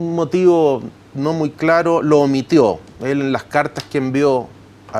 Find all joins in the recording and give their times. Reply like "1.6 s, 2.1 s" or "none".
none